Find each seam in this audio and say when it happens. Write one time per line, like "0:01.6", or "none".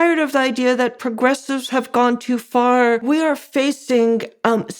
0:03.0